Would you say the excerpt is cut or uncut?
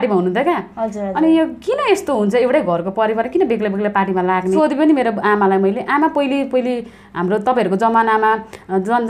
cut